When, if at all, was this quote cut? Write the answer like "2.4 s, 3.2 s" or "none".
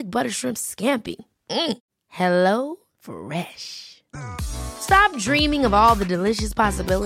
none